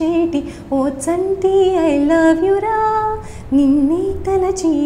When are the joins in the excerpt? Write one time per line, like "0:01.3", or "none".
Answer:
none